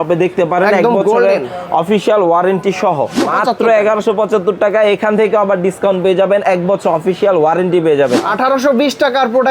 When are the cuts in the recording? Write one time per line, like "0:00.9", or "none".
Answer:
0:03.2
0:08.3